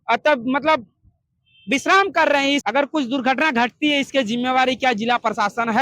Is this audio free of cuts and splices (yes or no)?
no